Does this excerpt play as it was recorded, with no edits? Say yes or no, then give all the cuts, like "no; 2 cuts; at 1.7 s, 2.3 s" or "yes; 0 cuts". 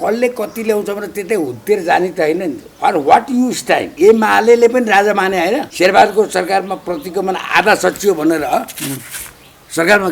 no; 2 cuts; at 3.9 s, 5.7 s